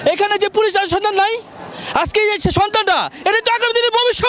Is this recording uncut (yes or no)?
yes